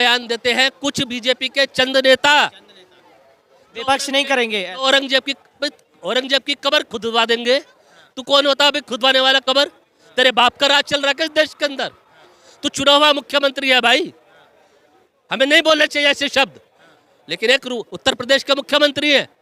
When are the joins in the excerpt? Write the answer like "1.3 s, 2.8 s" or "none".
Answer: none